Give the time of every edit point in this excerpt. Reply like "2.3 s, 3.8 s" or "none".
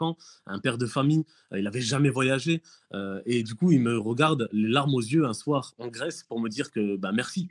none